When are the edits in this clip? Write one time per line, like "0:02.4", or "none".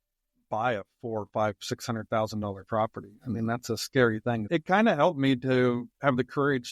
0:04.4